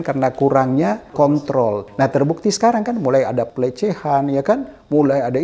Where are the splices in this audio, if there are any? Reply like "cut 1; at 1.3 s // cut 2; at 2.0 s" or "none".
cut 1; at 1.1 s // cut 2; at 1.9 s // cut 3; at 3.5 s